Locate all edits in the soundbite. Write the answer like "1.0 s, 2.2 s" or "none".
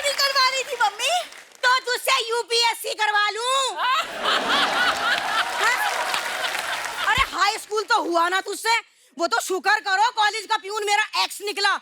6.9 s